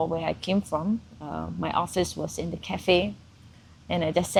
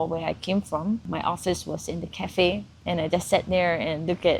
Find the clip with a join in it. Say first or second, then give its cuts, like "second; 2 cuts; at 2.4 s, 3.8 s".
second; 2 cuts; at 1.1 s, 2.7 s